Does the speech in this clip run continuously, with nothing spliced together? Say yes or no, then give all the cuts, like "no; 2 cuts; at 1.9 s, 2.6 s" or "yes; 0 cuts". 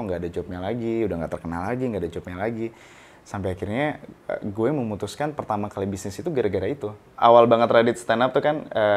no; 1 cut; at 7.0 s